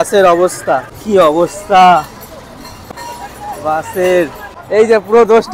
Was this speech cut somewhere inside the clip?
yes; 3 cuts; at 0.9 s, 2.8 s, 4.5 s

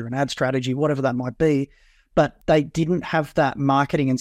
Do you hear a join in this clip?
yes; 1 cut; at 2.4 s

